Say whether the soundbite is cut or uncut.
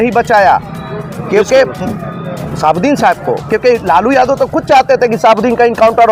uncut